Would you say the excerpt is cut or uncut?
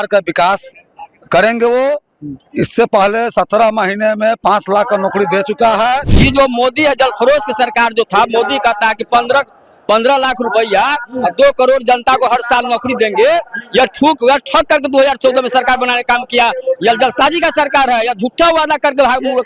cut